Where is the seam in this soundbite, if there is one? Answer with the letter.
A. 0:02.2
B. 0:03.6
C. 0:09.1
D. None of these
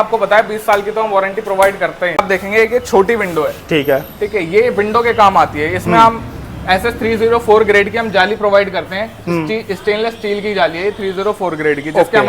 A